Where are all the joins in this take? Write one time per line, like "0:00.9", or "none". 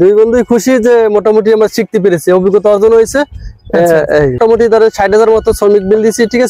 0:04.4